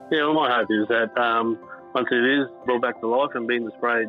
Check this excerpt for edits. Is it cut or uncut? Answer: uncut